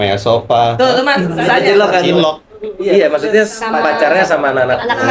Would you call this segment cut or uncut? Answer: uncut